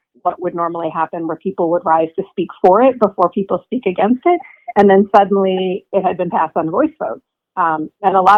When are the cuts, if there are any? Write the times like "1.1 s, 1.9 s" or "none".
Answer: none